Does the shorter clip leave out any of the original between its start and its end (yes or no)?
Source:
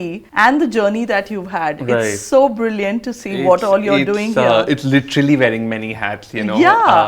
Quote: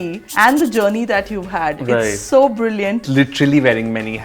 yes